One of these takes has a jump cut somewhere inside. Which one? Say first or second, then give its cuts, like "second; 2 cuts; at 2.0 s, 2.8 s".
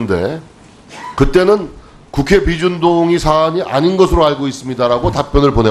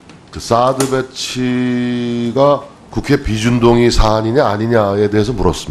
first; 1 cut; at 4.1 s